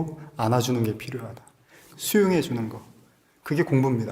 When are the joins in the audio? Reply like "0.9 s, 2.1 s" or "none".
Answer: 1.8 s